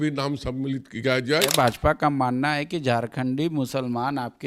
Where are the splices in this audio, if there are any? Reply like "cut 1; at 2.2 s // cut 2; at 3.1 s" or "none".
cut 1; at 1.5 s